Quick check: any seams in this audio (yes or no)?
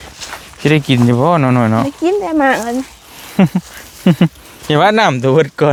no